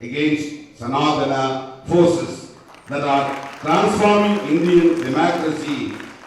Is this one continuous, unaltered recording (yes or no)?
yes